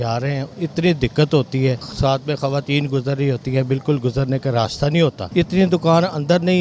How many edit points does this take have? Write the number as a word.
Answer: two